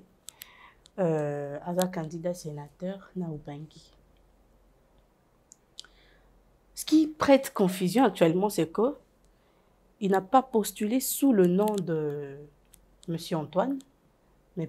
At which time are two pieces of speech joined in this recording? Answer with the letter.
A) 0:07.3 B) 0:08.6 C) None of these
C